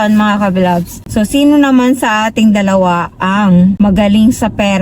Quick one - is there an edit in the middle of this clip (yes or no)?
yes